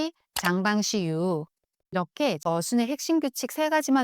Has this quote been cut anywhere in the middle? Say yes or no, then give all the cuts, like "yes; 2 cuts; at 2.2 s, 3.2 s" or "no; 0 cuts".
yes; 1 cut; at 2.4 s